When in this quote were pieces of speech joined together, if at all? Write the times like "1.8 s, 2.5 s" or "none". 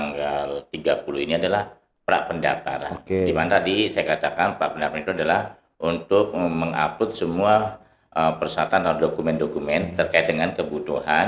none